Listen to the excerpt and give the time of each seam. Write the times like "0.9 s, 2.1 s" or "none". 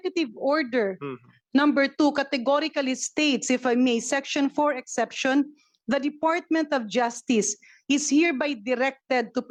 none

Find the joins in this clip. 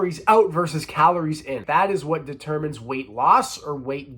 1.6 s

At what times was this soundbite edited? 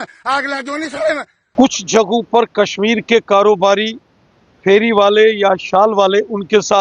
1.4 s

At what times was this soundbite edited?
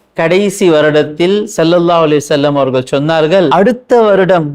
3.5 s

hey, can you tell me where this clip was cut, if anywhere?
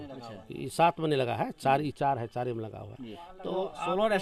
none

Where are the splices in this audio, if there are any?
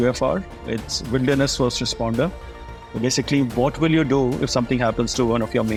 none

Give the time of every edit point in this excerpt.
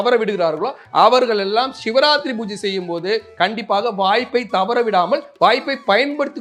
none

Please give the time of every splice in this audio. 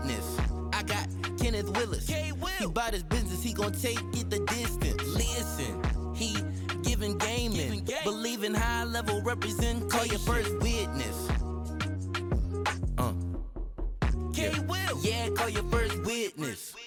none

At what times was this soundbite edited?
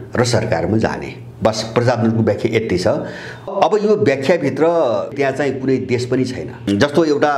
3.5 s, 5.1 s, 6.7 s

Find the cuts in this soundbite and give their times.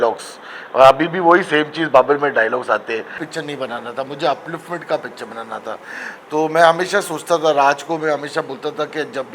3.2 s

